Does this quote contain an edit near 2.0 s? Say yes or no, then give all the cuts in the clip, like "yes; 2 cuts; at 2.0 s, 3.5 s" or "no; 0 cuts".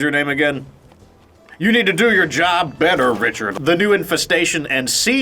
no; 1 cut; at 3.5 s